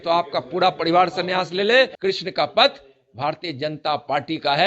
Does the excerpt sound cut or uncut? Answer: cut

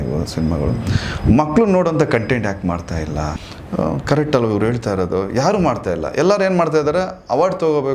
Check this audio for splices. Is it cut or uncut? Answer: cut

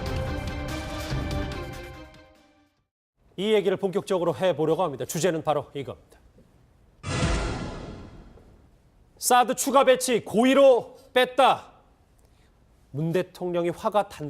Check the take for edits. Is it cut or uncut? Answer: cut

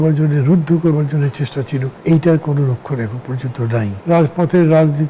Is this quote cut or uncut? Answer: cut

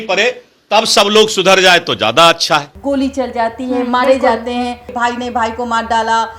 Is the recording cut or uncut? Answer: cut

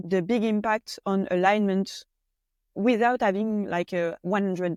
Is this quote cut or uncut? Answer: uncut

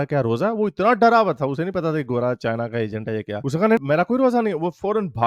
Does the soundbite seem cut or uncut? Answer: uncut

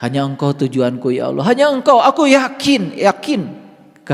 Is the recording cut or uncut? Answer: uncut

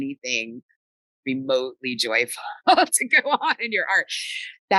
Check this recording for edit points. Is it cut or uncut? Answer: uncut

